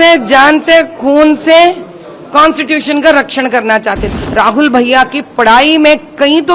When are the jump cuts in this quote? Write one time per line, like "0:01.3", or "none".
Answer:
0:04.1